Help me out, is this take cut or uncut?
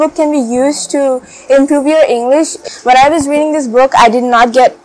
cut